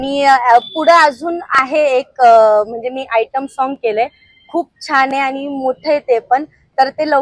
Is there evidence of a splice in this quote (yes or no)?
no